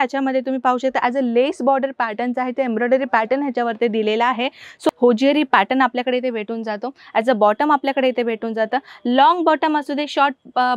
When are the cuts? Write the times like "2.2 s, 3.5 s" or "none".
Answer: 4.9 s